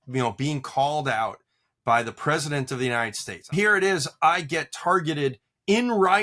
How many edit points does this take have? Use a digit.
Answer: 1